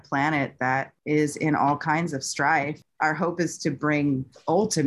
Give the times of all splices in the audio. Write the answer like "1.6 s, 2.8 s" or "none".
2.8 s